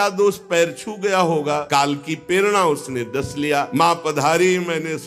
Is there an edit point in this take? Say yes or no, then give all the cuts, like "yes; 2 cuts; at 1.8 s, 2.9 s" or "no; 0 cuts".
yes; 2 cuts; at 1.6 s, 3.7 s